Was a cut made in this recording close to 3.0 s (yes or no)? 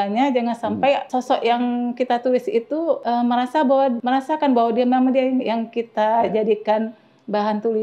yes